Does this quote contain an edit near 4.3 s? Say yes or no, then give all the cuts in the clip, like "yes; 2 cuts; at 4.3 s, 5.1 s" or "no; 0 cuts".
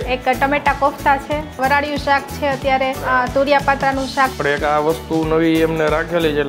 yes; 3 cuts; at 1.6 s, 3.0 s, 4.3 s